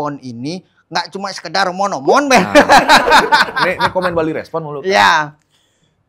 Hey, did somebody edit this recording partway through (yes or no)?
no